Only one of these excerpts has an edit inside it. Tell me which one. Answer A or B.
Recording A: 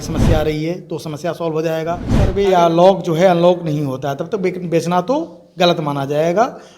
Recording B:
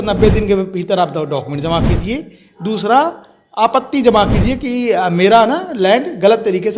A